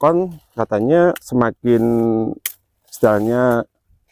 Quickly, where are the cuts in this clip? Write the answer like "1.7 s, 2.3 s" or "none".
none